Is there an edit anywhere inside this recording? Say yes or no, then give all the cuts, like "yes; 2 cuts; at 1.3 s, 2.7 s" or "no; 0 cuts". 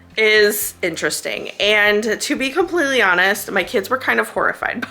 no; 0 cuts